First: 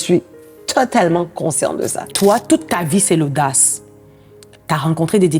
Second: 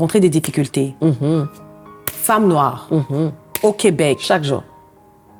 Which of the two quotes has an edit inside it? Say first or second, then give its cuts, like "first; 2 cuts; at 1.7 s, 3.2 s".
first; 1 cut; at 2.1 s